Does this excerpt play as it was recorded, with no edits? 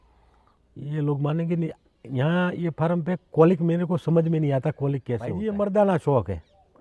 no; 1 cut; at 5.3 s

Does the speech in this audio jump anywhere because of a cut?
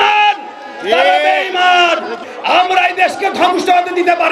yes; 1 cut; at 2.2 s

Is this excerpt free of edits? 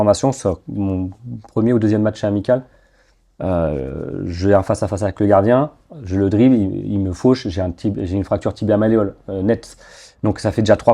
yes; 0 cuts

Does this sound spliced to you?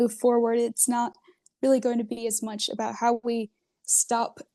no; 0 cuts

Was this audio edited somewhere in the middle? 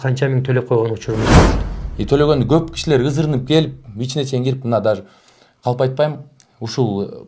yes; 1 cut; at 1.5 s

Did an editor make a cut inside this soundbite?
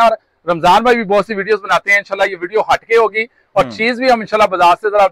no; 0 cuts

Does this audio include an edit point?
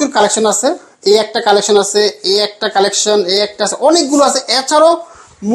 no; 0 cuts

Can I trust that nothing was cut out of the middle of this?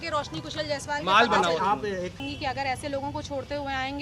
no; 1 cut; at 2.2 s

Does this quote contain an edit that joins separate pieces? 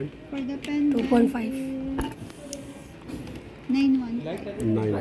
yes; 1 cut; at 3.4 s

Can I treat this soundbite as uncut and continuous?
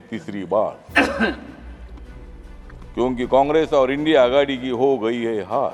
yes; 0 cuts

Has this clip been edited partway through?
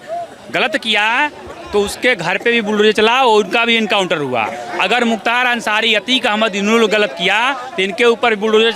no; 0 cuts

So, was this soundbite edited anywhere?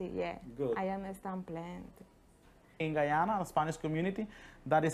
yes; 1 cut; at 2.8 s

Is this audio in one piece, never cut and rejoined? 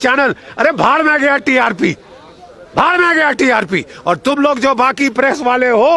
yes; 0 cuts

